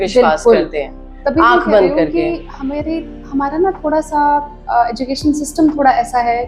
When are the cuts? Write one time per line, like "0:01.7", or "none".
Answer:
none